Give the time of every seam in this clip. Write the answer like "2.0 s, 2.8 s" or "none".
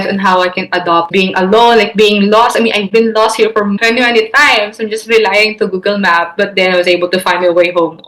1.1 s, 3.8 s